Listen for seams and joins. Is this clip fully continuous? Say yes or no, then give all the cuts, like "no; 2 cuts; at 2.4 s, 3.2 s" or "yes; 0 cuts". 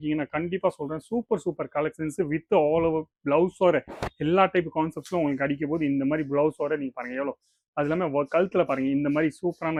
yes; 0 cuts